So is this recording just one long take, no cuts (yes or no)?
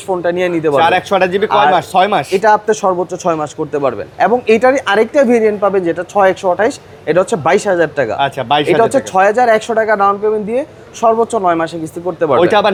yes